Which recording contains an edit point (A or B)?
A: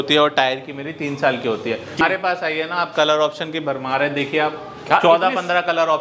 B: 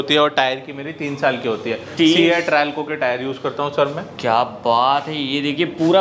A